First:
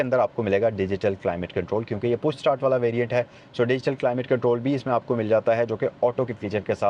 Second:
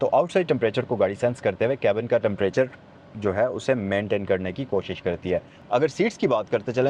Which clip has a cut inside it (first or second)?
second